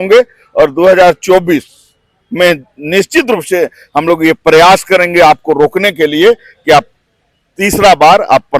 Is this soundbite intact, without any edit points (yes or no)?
yes